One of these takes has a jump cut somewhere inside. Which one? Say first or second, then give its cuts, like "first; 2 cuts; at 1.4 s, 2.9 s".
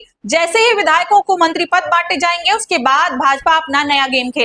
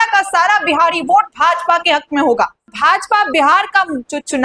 second; 1 cut; at 2.7 s